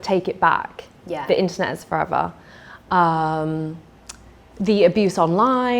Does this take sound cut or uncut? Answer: uncut